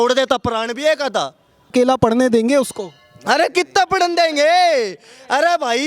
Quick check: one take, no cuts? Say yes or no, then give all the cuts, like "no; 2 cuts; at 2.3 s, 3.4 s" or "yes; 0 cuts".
no; 1 cut; at 1.7 s